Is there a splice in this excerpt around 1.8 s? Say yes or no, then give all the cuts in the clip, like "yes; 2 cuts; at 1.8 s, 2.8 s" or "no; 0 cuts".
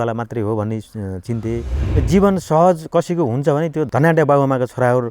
yes; 1 cut; at 1.8 s